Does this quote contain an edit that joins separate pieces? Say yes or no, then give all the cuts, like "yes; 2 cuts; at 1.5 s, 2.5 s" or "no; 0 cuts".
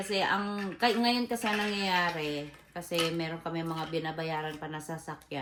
no; 0 cuts